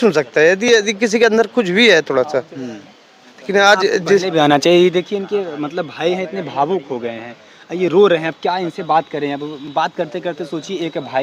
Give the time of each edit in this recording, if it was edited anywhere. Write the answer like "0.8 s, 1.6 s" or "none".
none